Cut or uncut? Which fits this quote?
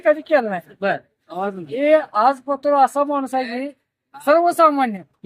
uncut